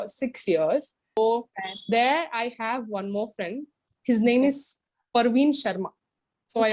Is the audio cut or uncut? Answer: cut